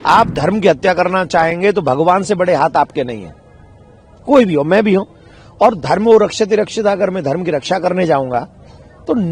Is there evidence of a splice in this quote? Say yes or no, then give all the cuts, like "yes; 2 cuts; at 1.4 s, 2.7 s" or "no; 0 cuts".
no; 0 cuts